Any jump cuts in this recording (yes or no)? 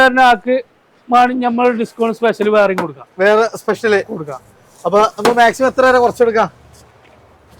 no